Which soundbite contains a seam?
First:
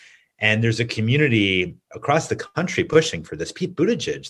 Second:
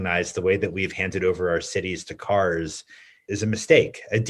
second; 1 cut; at 3.1 s

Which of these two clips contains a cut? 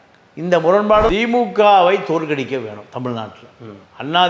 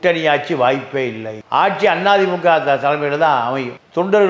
first; 1 cut; at 1.1 s

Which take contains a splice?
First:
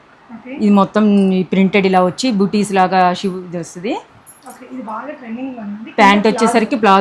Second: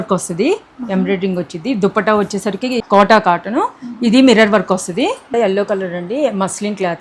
second; 2 cuts; at 2.8 s, 5.3 s

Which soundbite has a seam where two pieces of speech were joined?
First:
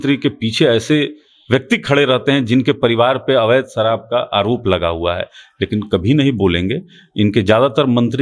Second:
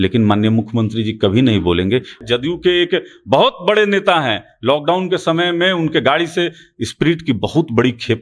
second; 1 cut; at 2.2 s

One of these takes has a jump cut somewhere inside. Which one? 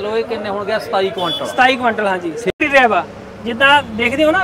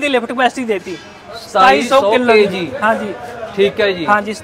first; 1 cut; at 2.5 s

